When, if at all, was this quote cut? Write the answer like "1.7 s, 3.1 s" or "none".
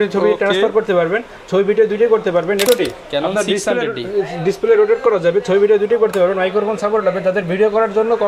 2.6 s